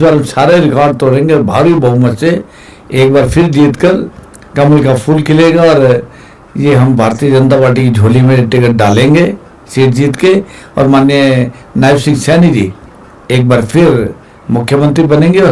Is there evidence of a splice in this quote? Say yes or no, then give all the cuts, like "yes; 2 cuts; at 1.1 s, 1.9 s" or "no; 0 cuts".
no; 0 cuts